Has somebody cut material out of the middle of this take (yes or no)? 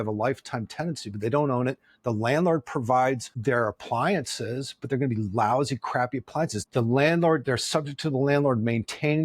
yes